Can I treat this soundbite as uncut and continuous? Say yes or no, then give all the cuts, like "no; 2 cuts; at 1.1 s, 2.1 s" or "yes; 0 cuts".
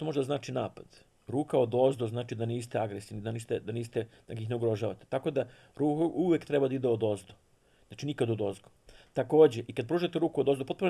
yes; 0 cuts